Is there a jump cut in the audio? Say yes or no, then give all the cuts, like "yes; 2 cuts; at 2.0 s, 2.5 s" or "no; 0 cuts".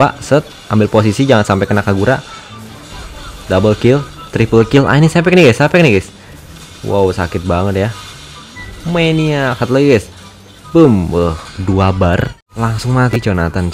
yes; 1 cut; at 12.4 s